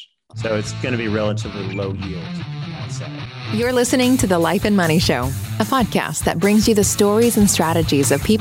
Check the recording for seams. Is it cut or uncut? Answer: cut